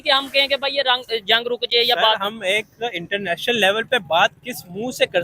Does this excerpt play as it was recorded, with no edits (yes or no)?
yes